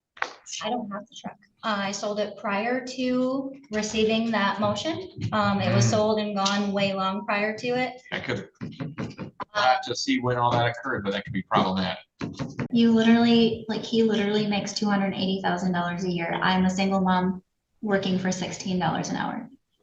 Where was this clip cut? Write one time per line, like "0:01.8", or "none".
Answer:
0:12.5